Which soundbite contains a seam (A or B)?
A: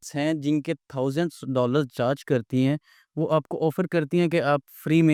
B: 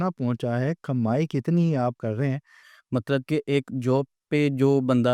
B